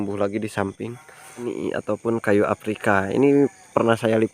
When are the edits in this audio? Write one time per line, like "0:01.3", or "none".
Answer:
0:01.5